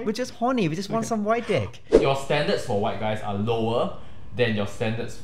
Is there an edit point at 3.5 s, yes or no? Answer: no